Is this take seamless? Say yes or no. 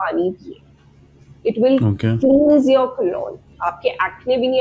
yes